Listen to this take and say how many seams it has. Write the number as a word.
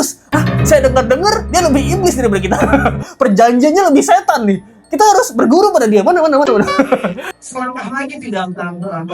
one